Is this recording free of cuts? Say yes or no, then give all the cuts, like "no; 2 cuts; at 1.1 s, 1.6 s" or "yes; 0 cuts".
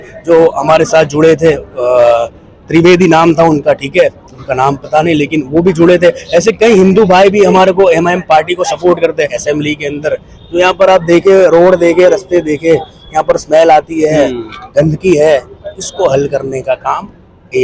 no; 1 cut; at 9.4 s